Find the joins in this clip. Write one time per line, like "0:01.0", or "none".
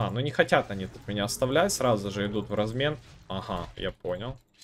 none